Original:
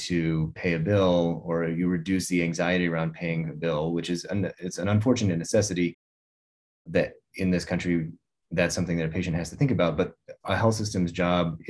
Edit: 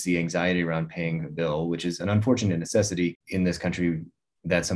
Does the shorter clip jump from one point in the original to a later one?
yes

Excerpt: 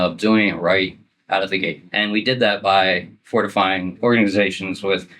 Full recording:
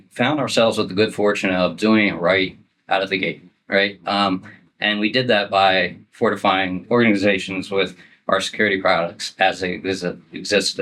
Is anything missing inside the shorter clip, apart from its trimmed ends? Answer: yes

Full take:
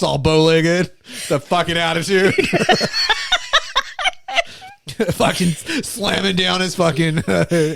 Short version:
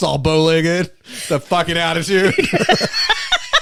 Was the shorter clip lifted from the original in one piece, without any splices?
yes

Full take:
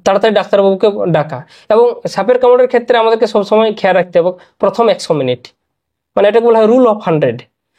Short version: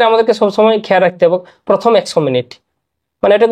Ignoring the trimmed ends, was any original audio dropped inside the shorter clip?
no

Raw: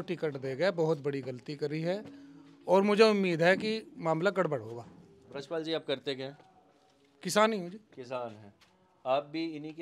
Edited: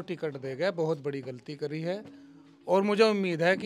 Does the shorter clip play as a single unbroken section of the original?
yes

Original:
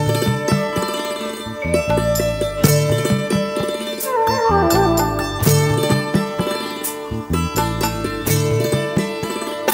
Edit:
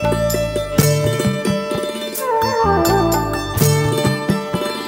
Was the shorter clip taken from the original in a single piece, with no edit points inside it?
yes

